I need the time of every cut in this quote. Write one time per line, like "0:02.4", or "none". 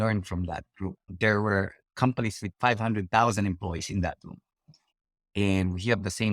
0:01.1
0:01.8

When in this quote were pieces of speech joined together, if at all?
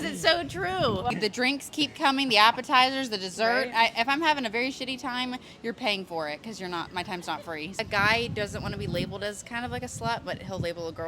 0:01.1
0:07.7

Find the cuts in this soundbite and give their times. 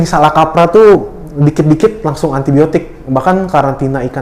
none

